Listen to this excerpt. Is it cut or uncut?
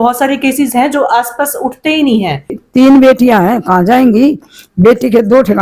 cut